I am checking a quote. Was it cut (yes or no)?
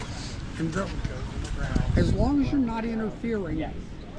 no